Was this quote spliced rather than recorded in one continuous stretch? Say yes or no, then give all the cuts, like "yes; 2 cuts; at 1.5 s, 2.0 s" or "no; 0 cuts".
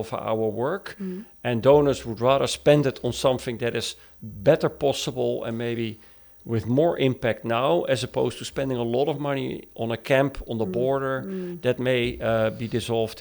no; 0 cuts